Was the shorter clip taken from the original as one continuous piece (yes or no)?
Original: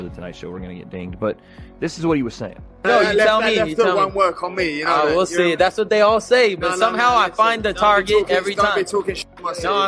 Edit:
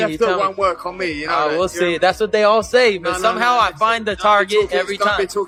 yes